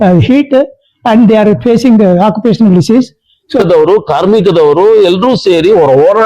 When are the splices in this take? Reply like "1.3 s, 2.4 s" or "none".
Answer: 3.6 s

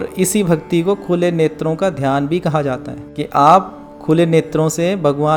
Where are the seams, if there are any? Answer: none

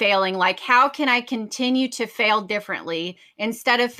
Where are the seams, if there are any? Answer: none

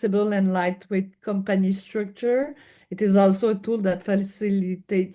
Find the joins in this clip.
none

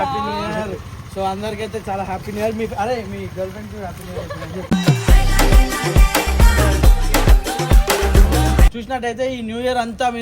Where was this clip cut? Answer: 8.7 s

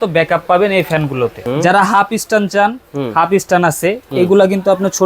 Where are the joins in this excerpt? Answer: 1.4 s

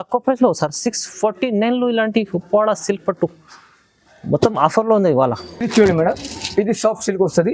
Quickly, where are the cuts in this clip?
none

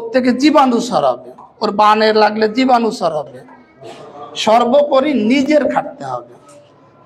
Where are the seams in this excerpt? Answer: 3.8 s

